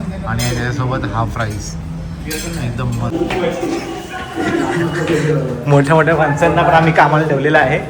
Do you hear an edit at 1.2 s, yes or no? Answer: no